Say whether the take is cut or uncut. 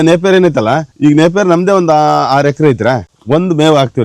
cut